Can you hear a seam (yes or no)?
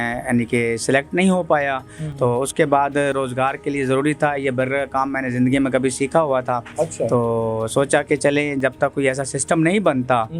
no